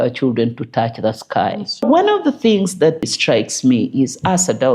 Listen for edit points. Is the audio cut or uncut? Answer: cut